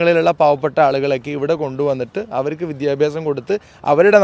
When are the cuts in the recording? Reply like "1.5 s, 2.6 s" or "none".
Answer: none